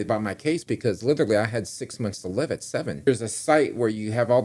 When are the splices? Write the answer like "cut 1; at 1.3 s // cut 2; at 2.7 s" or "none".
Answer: cut 1; at 3.1 s